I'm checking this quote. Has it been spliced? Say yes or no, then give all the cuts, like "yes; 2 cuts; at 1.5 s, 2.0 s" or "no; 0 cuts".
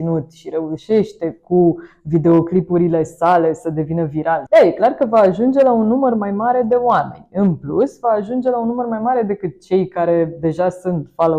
yes; 1 cut; at 4.4 s